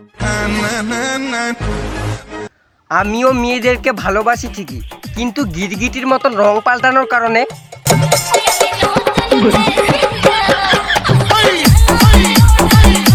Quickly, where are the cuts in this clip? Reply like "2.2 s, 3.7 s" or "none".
none

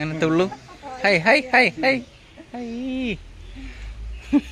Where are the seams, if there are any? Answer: none

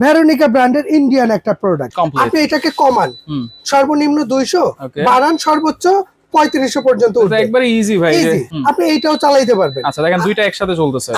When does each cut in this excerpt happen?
1.9 s, 8.5 s

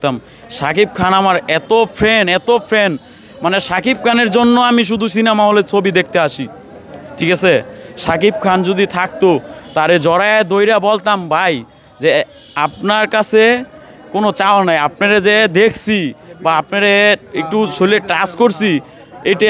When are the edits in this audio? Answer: none

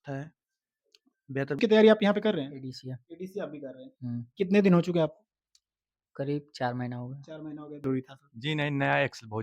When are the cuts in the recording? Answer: 1.6 s, 7.9 s

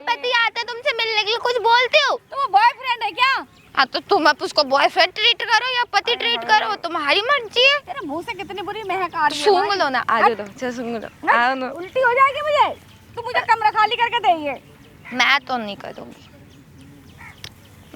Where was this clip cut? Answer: none

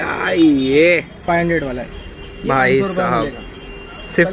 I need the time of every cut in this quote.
1.2 s

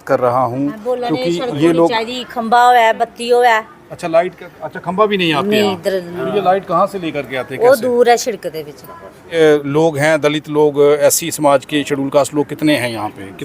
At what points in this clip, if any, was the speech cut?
9.3 s

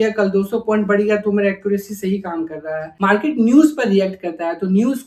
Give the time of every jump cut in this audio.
2.9 s

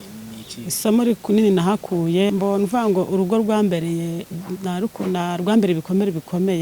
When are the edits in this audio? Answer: 2.3 s

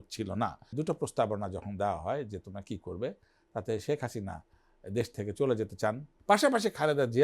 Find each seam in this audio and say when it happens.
0.7 s, 6.1 s

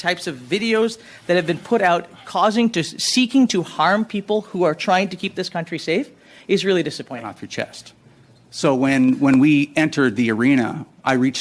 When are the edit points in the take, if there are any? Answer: 7.3 s

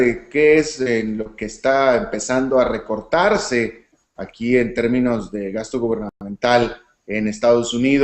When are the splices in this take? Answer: 2.5 s

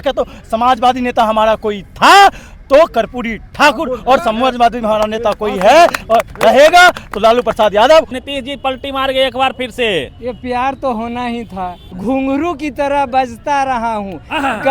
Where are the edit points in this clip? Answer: 8.2 s, 11.8 s

